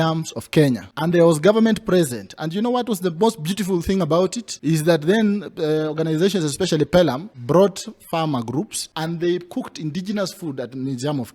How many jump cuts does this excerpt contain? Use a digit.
4